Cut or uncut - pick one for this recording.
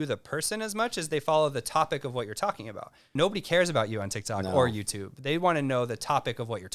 cut